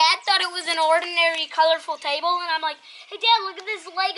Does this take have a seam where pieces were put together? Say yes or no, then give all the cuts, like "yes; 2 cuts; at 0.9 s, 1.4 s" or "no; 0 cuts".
no; 0 cuts